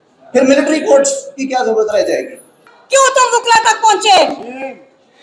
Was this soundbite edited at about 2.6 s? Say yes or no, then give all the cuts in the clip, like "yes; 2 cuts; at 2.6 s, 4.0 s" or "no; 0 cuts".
yes; 1 cut; at 2.6 s